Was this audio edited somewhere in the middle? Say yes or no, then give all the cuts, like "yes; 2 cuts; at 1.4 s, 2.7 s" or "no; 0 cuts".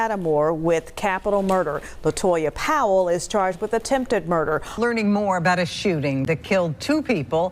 yes; 1 cut; at 4.7 s